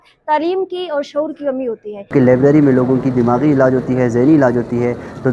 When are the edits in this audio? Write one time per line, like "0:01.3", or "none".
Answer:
0:02.1